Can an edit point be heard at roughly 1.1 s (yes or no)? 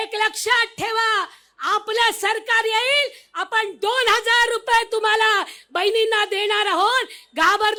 no